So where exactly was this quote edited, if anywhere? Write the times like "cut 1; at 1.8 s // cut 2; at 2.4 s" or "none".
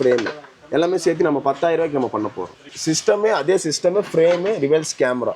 cut 1; at 2.7 s